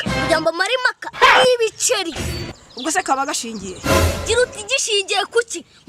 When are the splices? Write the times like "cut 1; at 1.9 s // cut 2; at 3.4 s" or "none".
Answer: cut 1; at 2.5 s